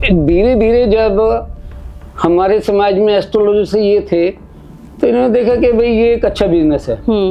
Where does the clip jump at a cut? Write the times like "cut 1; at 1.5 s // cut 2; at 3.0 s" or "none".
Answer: none